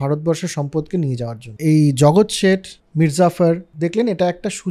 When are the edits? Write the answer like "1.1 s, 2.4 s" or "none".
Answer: 1.4 s, 2.8 s, 3.7 s

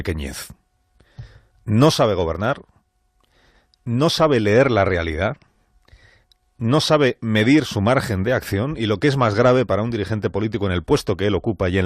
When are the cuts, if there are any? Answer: 8.0 s

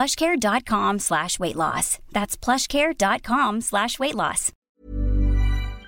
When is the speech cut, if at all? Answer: 4.5 s

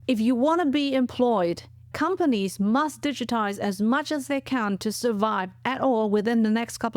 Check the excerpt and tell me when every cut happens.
1.9 s

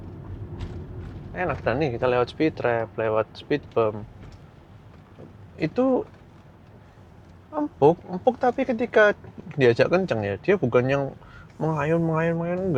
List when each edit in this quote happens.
none

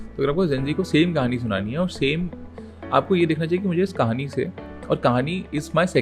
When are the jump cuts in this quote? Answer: none

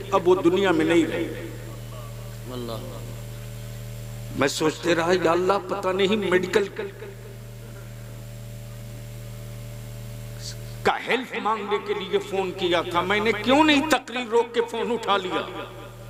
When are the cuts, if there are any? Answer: none

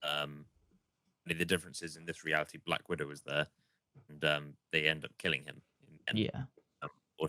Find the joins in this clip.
none

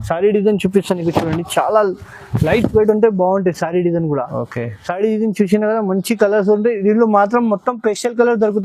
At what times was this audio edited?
none

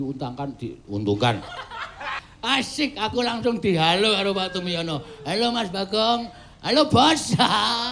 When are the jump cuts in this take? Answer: 2.3 s

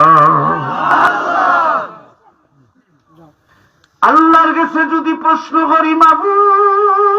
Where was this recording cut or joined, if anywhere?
1.1 s, 3.6 s

